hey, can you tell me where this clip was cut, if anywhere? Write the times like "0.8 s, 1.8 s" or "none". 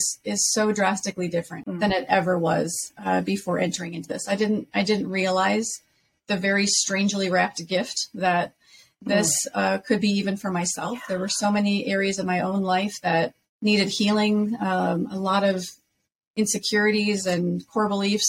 1.6 s, 13.4 s